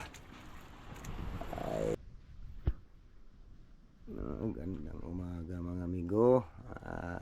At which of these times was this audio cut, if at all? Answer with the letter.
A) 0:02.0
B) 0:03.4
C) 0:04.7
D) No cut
A